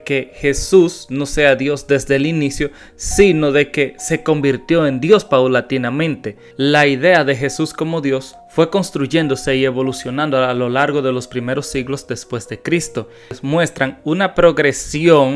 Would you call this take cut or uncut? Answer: cut